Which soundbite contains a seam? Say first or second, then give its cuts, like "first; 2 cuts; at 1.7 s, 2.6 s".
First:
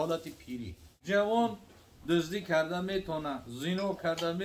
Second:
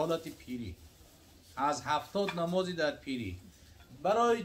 first; 1 cut; at 0.9 s